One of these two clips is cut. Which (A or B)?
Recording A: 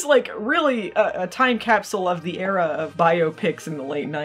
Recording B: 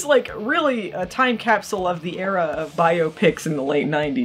B